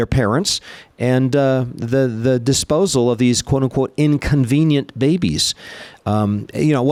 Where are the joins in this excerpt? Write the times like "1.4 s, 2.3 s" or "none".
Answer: none